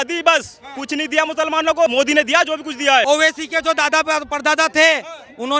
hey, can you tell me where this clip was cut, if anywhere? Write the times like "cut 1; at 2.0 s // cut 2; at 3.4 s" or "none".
cut 1; at 1.9 s // cut 2; at 3.0 s